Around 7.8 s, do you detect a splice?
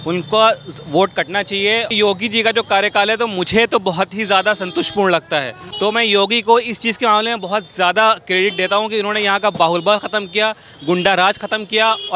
no; 2 cuts; at 1.9 s, 5.6 s

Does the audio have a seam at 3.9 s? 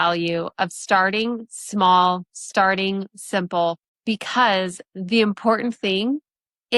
yes; 1 cut; at 3.9 s

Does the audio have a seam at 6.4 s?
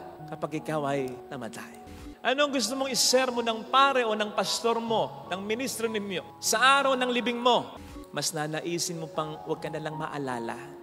no; 2 cuts; at 2.0 s, 7.9 s

